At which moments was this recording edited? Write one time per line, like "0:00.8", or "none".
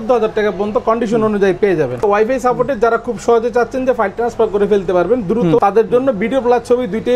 0:02.0